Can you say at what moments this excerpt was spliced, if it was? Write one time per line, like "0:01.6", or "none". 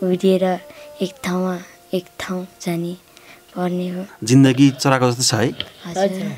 0:04.1

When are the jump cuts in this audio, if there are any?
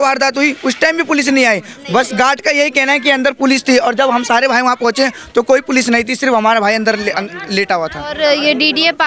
none

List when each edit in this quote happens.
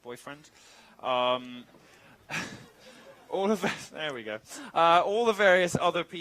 0:03.5

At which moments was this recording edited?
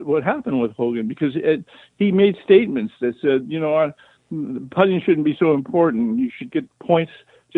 none

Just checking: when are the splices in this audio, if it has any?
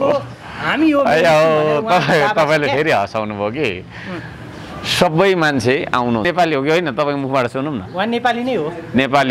0:06.2

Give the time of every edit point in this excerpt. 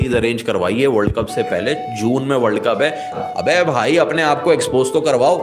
0:03.2

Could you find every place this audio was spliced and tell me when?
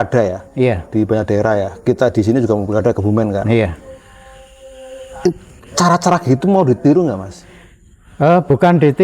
none

